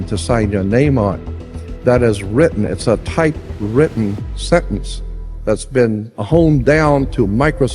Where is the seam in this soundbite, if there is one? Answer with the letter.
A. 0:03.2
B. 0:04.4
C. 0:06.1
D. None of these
C